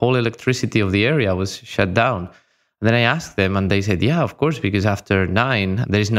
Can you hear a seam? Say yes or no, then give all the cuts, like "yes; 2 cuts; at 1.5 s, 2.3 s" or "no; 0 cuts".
no; 0 cuts